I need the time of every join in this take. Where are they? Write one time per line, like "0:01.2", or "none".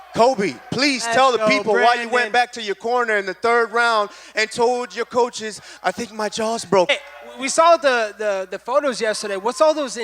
0:06.9